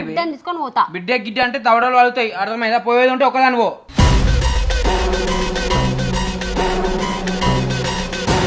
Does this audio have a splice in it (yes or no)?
no